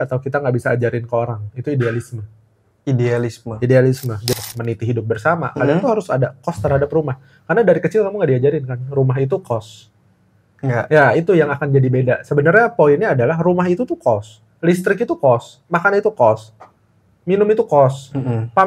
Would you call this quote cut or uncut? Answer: cut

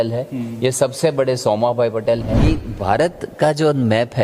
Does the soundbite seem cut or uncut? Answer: cut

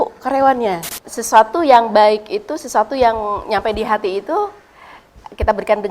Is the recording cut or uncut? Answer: cut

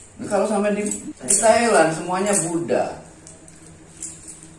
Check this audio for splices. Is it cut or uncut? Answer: cut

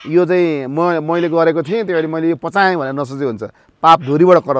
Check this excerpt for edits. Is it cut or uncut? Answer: uncut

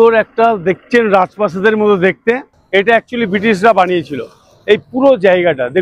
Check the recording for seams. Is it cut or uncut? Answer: uncut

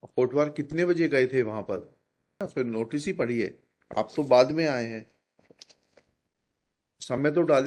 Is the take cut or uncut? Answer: cut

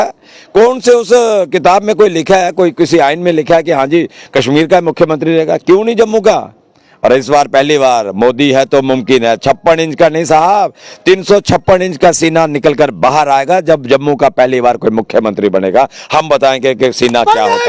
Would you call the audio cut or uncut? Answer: uncut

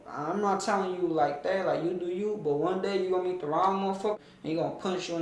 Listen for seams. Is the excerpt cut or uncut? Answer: cut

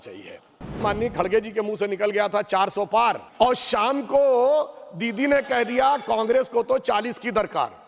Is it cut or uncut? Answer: cut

